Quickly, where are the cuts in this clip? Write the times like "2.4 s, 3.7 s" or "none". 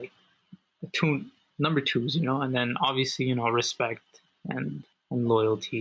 4.9 s